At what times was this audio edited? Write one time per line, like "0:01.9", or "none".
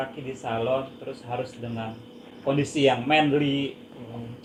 none